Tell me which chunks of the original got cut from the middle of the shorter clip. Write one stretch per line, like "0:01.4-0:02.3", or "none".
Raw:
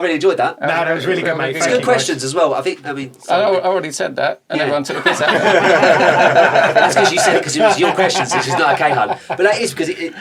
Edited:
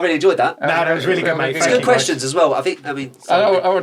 none